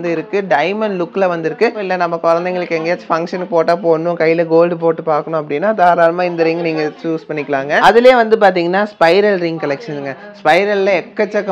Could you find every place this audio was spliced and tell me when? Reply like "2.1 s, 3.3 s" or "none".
1.8 s, 7.8 s